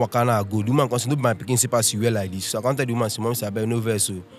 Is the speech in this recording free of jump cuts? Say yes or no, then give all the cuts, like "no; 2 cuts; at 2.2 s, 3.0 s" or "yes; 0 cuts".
yes; 0 cuts